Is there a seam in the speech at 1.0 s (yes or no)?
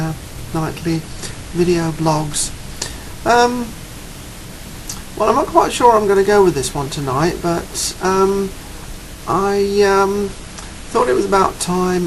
no